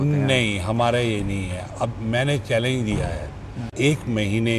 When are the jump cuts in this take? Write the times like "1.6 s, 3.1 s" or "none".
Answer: 3.6 s